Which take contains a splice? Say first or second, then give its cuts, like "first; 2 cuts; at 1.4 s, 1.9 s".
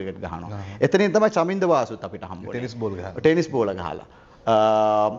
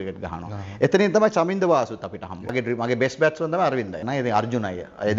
second; 2 cuts; at 2.5 s, 4.0 s